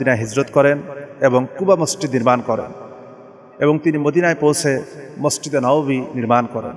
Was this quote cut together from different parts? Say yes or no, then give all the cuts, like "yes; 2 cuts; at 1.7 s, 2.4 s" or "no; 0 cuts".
no; 0 cuts